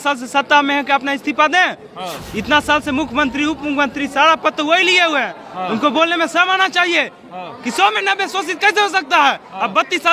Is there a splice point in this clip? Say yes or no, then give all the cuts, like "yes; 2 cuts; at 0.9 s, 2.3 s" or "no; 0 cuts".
no; 0 cuts